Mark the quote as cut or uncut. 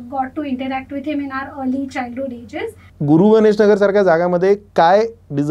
cut